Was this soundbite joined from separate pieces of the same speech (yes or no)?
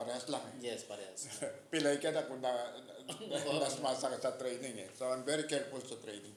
no